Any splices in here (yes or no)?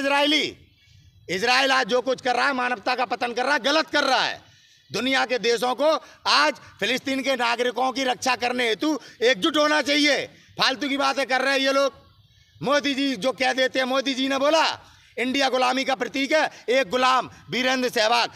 no